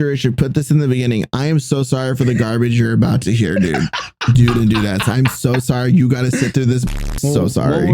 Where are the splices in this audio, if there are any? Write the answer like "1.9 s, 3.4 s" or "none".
6.9 s